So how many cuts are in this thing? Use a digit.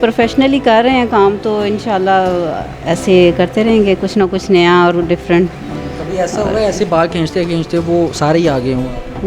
0